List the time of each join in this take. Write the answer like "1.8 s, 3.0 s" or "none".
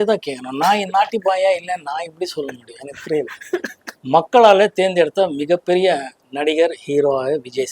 3.9 s